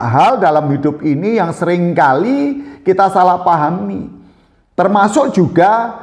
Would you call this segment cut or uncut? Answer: uncut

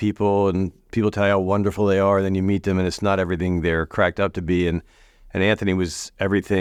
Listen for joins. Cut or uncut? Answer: uncut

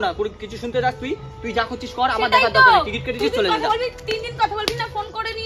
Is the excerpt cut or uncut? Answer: uncut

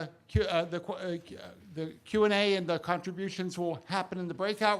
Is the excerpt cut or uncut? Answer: cut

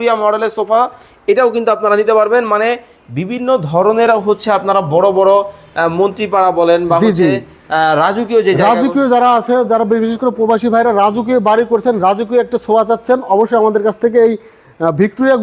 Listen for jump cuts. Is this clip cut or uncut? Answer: uncut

